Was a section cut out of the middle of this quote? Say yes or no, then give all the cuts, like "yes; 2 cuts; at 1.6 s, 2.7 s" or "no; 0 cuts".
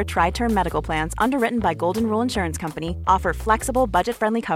no; 0 cuts